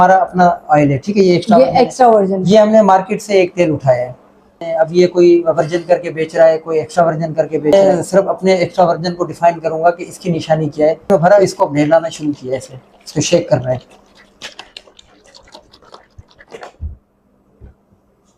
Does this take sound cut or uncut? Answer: cut